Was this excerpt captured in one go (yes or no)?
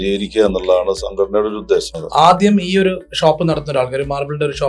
no